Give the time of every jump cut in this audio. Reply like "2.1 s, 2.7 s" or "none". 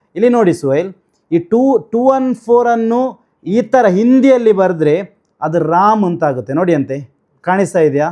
none